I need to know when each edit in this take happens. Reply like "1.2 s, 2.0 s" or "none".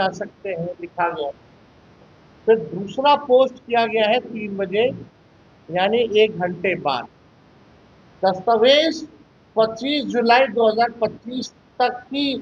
none